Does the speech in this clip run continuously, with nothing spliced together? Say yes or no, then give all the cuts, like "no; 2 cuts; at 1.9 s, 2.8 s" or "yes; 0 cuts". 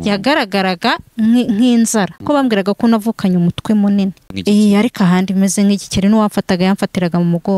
no; 2 cuts; at 2.2 s, 4.3 s